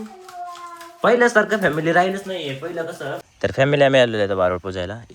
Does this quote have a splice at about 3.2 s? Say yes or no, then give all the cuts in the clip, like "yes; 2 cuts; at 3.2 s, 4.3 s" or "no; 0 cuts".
yes; 1 cut; at 3.2 s